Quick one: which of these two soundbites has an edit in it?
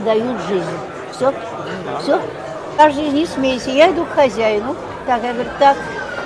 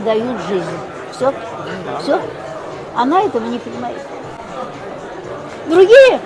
first; 1 cut; at 2.8 s

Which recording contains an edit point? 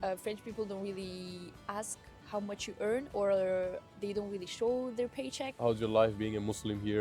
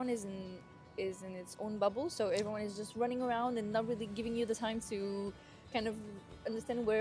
first; 1 cut; at 5.4 s

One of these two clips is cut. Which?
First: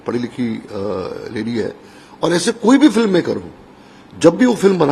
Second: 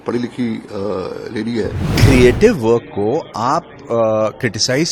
second; 1 cut; at 1.9 s

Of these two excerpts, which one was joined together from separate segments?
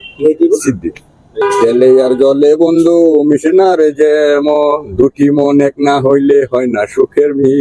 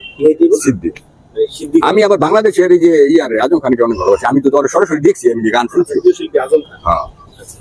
first; 1 cut; at 1.2 s

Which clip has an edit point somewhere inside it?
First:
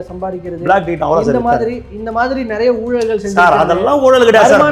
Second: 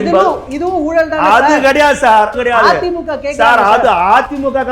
second; 1 cut; at 2.4 s

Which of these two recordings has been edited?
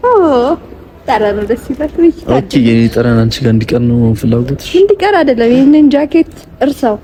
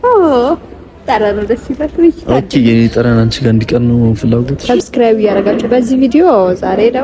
second; 1 cut; at 4.5 s

